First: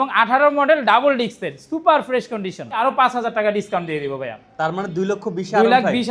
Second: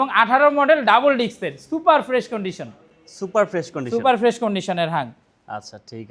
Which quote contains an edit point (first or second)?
first